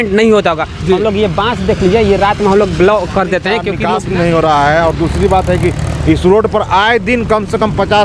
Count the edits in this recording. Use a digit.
1